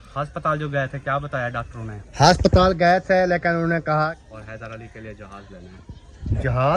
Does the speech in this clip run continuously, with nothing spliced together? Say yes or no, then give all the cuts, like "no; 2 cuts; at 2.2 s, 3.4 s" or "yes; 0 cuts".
no; 1 cut; at 4.1 s